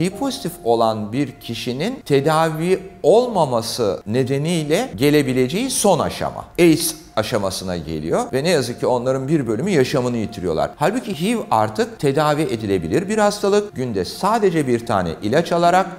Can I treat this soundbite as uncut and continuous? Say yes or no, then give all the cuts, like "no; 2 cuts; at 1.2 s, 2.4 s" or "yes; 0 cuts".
yes; 0 cuts